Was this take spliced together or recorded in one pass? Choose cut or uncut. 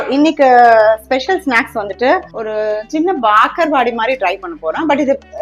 cut